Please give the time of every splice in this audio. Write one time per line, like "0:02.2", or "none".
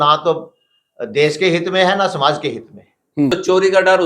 0:03.1